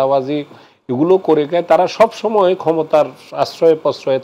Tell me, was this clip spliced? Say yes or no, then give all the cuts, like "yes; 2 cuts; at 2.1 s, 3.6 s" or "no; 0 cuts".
no; 0 cuts